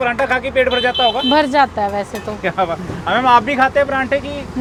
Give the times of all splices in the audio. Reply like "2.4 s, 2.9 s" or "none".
none